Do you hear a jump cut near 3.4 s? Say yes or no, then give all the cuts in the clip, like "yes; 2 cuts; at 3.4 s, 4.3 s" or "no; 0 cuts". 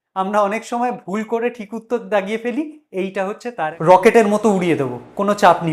yes; 1 cut; at 3.4 s